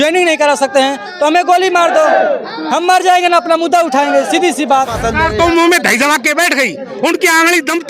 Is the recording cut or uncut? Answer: cut